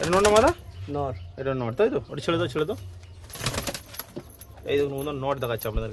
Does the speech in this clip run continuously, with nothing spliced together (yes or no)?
yes